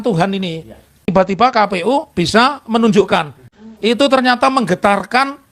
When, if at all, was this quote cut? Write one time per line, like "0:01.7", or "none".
none